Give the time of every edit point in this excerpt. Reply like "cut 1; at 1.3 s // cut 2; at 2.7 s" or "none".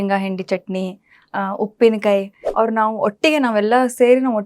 cut 1; at 2.4 s